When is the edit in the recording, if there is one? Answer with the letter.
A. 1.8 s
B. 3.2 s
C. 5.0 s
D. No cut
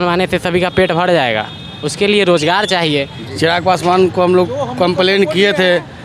B